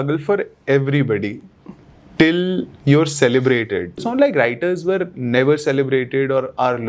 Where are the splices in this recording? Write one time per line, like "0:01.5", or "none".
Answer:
0:04.0